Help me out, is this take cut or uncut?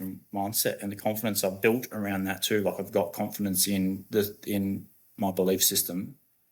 uncut